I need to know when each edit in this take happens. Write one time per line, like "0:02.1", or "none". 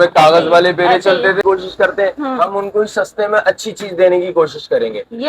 0:01.4

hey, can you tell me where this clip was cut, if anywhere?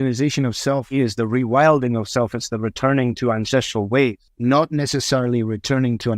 0:00.9
0:04.3

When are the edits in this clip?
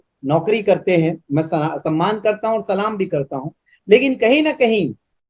0:01.8

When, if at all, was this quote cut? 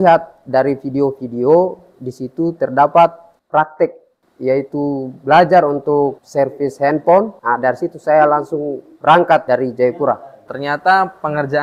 0:10.4

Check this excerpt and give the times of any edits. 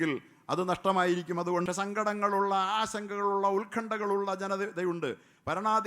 0:01.6

